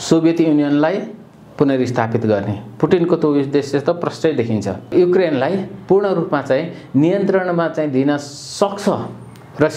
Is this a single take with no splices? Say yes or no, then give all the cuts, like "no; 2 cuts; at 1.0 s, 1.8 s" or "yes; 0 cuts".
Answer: no; 1 cut; at 4.8 s